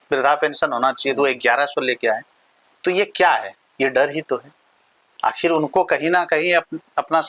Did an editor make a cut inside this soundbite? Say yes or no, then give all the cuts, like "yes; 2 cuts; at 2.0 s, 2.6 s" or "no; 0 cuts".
no; 0 cuts